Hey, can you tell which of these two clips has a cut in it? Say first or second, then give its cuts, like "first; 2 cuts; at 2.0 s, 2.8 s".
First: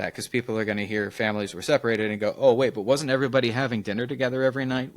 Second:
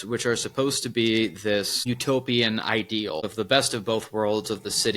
second; 2 cuts; at 1.7 s, 3.3 s